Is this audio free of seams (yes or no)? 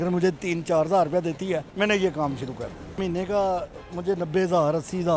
no